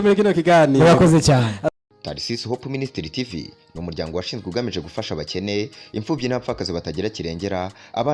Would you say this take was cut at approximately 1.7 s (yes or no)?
yes